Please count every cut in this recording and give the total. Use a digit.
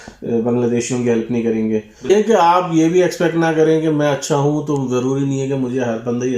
1